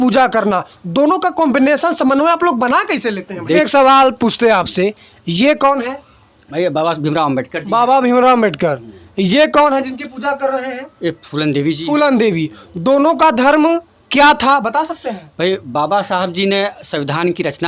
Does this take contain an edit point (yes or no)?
yes